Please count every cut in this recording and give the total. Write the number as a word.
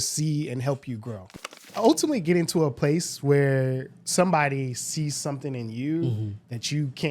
one